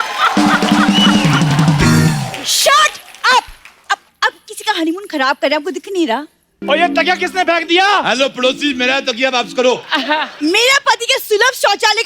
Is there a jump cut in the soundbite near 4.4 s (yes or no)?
no